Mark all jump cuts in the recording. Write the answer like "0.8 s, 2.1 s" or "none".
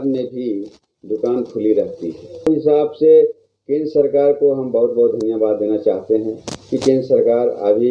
2.5 s